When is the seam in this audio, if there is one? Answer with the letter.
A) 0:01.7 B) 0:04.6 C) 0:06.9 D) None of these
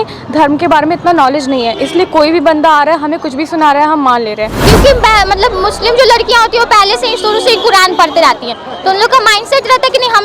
B